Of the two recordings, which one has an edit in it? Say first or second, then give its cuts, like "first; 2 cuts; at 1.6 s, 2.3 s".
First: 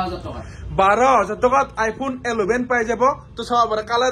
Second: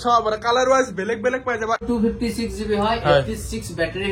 second; 1 cut; at 1.8 s